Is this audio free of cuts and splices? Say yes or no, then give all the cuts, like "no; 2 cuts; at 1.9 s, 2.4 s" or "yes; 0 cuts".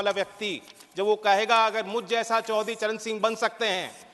yes; 0 cuts